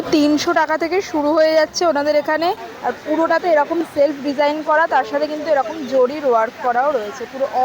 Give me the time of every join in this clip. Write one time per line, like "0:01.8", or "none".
0:02.7